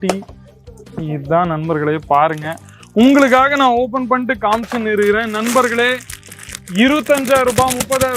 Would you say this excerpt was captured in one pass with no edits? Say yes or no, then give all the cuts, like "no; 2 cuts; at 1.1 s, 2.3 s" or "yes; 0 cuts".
yes; 0 cuts